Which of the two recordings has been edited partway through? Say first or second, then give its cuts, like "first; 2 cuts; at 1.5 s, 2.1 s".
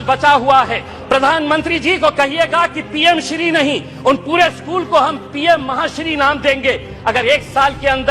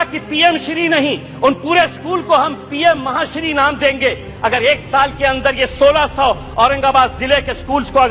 first; 1 cut; at 0.9 s